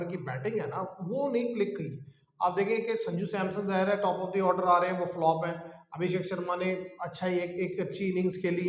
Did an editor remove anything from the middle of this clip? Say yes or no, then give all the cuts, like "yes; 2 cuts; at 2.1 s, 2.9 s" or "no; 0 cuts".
no; 0 cuts